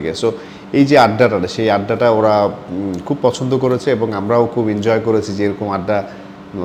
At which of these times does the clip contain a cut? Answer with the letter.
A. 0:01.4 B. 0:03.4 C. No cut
C